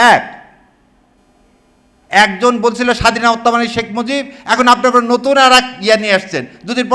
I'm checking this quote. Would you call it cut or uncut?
uncut